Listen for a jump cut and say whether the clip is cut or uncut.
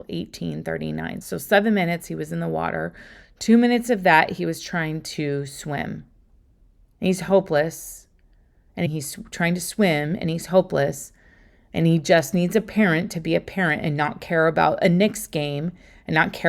cut